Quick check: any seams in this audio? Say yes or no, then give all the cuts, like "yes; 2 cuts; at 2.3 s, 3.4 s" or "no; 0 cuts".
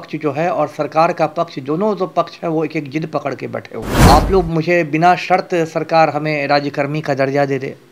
yes; 1 cut; at 3.9 s